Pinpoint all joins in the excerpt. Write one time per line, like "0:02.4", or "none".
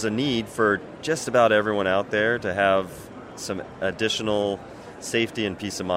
none